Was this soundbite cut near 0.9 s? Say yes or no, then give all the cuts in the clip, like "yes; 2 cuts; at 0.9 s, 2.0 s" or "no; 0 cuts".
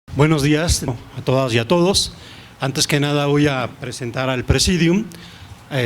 yes; 1 cut; at 0.9 s